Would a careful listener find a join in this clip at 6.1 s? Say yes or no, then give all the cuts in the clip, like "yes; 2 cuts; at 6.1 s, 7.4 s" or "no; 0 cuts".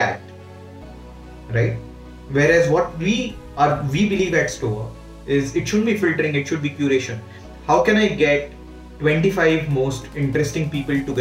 no; 0 cuts